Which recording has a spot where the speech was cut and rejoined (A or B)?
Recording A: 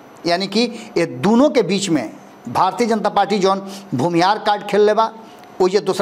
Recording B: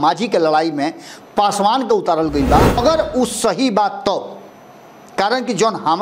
B